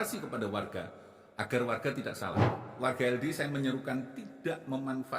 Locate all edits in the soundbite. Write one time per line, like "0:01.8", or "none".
0:02.6